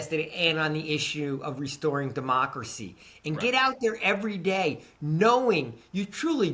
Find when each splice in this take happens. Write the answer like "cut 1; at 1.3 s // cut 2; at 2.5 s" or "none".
none